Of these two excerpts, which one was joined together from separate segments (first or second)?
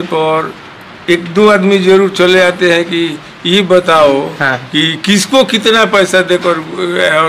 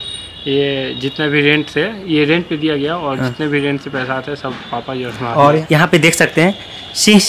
second